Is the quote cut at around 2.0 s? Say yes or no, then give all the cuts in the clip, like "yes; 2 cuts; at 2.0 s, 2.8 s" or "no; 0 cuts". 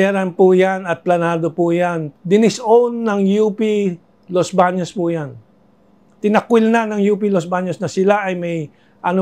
yes; 1 cut; at 2.0 s